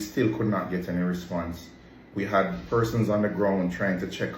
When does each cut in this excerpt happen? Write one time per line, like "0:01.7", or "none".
none